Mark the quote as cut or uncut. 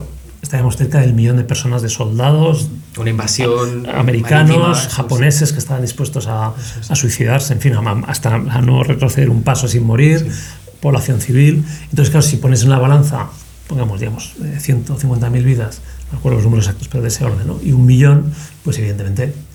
uncut